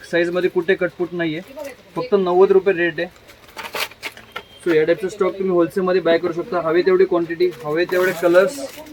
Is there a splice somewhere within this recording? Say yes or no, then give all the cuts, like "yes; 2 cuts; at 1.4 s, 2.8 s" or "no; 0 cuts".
no; 0 cuts